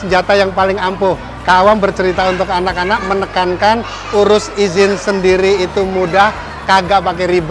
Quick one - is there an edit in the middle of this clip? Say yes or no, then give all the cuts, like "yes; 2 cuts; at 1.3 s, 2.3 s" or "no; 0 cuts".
no; 0 cuts